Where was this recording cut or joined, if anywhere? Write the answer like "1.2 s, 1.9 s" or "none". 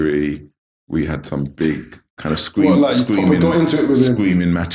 none

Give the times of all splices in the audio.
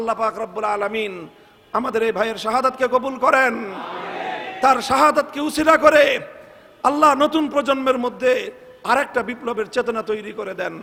none

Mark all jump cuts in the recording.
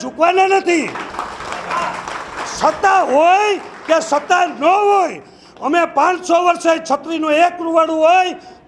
none

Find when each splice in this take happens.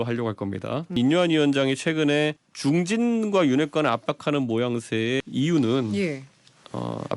1.0 s, 2.5 s, 5.2 s

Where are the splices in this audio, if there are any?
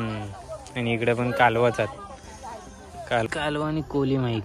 3.3 s

